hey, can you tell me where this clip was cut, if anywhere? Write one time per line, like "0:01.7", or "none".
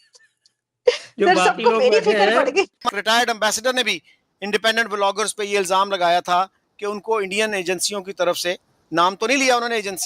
0:02.8